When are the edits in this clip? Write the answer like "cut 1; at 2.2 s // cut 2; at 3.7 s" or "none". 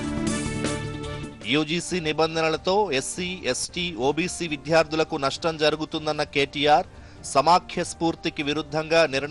cut 1; at 0.9 s